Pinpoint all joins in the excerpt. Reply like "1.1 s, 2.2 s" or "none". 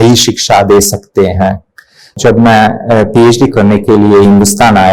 2.1 s